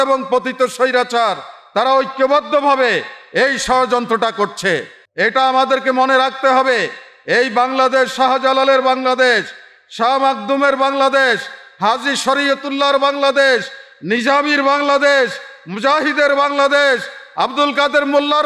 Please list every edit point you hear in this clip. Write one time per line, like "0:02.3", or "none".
0:05.0